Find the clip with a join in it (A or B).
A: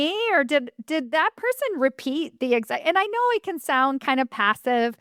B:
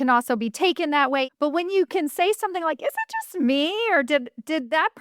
B